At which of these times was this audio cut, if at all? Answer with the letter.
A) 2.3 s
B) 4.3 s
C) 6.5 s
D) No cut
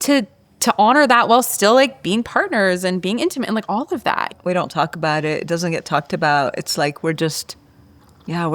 B